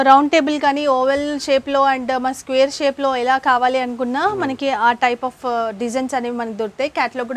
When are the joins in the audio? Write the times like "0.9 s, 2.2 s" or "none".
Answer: none